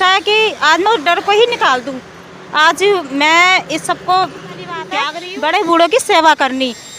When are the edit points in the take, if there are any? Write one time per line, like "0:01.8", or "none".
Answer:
0:05.1